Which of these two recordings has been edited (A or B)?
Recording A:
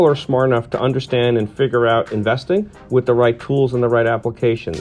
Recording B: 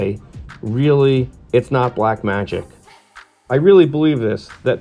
B